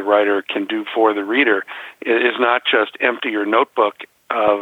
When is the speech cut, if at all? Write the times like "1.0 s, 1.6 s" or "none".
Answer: none